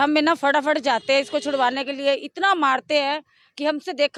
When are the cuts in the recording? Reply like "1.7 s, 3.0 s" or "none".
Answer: none